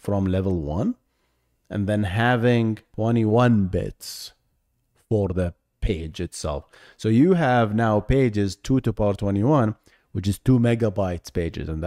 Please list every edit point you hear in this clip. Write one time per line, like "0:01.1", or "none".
0:02.9